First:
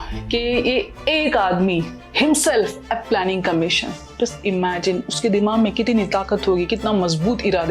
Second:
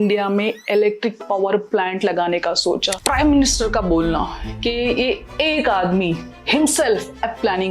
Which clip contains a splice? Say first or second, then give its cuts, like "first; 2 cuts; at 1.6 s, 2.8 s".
second; 1 cut; at 2.9 s